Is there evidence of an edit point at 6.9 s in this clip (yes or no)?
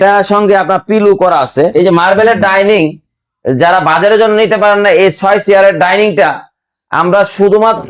no